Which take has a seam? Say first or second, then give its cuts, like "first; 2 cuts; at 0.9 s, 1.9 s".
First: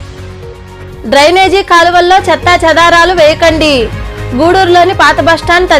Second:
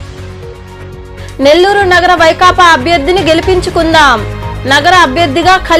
first; 1 cut; at 1.0 s